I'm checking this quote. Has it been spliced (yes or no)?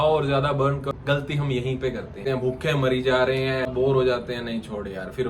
yes